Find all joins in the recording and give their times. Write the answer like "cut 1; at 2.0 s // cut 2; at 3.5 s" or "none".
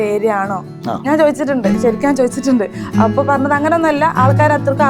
none

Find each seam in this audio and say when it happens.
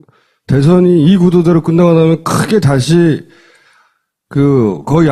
cut 1; at 3.8 s

